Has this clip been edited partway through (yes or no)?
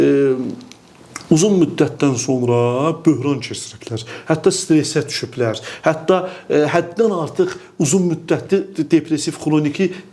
no